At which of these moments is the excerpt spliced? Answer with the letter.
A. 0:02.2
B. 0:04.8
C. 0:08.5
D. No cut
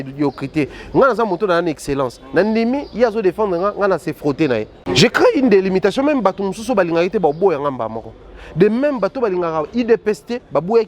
B